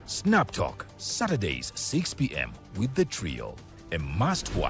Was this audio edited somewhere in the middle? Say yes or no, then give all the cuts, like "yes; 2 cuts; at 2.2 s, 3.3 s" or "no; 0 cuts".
no; 0 cuts